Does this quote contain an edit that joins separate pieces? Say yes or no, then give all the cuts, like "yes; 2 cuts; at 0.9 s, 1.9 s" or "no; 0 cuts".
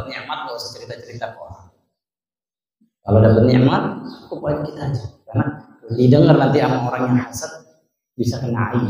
no; 0 cuts